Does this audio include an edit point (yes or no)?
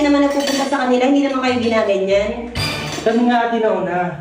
no